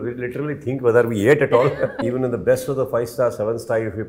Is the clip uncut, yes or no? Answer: no